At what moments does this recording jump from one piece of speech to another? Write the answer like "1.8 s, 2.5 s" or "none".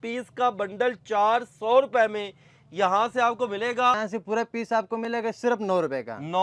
4.0 s